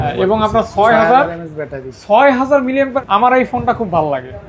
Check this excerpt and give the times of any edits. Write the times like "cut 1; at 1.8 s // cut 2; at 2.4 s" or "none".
cut 1; at 3.0 s

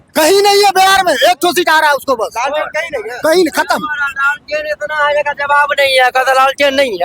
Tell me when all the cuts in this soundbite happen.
none

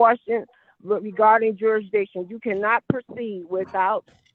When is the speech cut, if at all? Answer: none

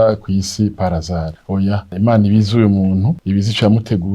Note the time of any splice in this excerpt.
cut 1; at 1.8 s // cut 2; at 3.2 s

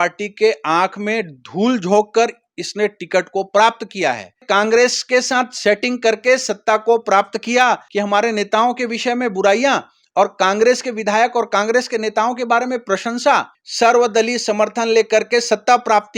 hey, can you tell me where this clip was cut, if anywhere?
cut 1; at 4.4 s // cut 2; at 7.9 s // cut 3; at 13.6 s

